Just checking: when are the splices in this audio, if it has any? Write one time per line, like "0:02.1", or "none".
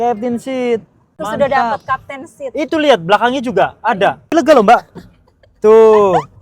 0:01.1
0:04.3